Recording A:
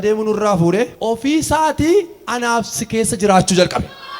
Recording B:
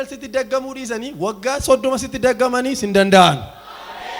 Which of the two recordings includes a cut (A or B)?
A